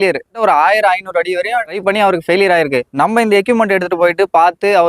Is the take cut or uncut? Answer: cut